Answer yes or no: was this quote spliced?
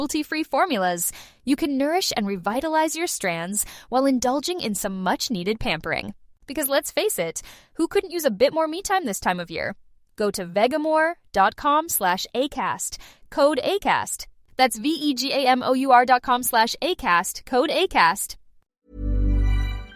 yes